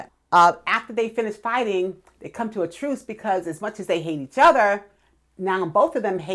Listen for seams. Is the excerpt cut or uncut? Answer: uncut